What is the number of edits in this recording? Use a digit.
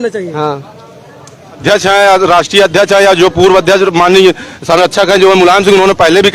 1